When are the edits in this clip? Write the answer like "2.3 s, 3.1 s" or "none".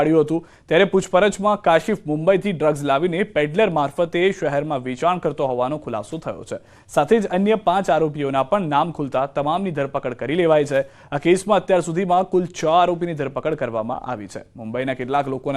5.6 s